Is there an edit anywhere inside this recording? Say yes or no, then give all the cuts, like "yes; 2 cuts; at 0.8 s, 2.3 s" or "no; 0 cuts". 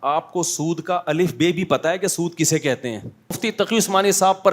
yes; 1 cut; at 3.4 s